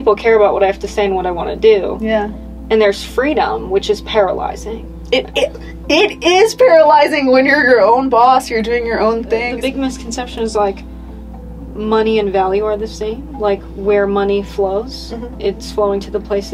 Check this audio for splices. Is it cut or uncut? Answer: cut